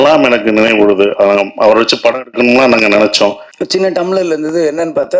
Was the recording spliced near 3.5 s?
yes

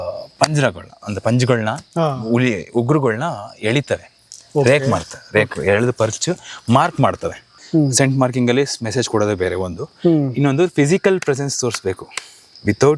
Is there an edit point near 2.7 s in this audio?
no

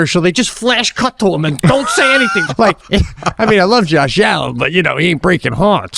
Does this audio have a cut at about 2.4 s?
yes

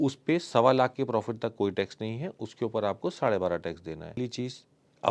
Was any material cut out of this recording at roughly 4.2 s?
yes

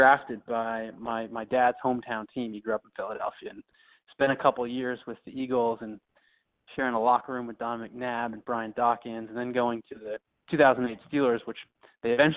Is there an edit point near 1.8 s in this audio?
no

